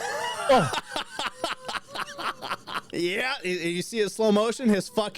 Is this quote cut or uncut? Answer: cut